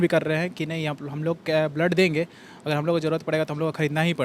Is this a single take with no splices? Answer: yes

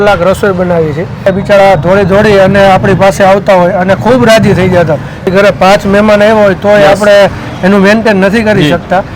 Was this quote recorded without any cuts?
no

